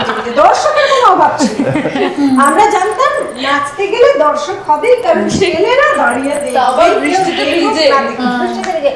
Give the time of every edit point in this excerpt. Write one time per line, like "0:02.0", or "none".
none